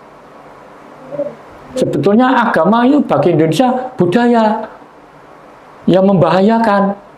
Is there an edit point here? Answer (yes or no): no